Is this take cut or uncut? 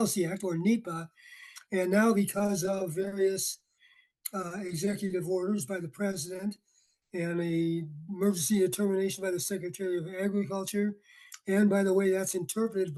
uncut